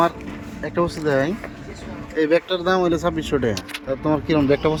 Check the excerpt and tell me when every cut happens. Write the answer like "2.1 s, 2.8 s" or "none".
none